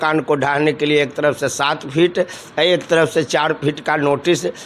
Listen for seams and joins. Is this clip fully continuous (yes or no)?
yes